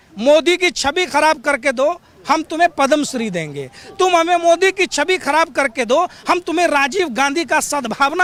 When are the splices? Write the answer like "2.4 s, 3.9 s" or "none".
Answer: none